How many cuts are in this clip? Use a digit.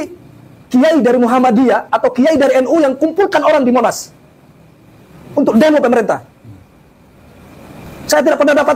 0